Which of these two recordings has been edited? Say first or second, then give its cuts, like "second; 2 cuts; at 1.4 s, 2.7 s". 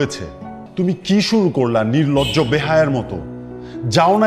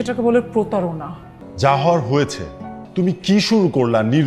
second; 1 cut; at 1.2 s